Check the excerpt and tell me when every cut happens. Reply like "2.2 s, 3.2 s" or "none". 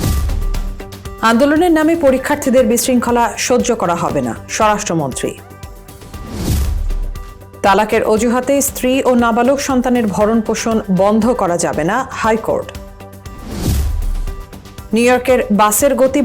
1.1 s